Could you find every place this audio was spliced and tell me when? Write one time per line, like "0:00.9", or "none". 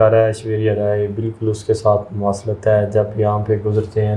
none